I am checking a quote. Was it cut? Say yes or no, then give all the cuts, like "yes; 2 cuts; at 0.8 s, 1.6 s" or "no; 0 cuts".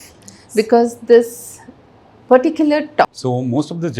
yes; 1 cut; at 3.1 s